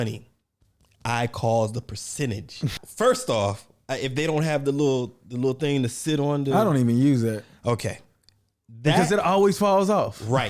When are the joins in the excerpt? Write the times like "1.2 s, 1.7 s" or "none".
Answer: 2.8 s